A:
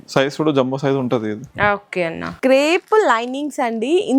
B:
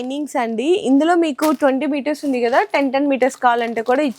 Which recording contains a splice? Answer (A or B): A